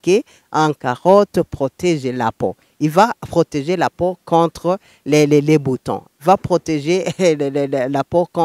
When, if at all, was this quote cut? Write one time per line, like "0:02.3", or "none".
none